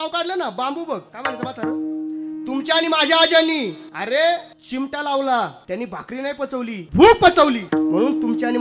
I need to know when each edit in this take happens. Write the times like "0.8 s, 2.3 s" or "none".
1.1 s, 3.9 s, 4.6 s, 5.6 s, 6.8 s, 7.6 s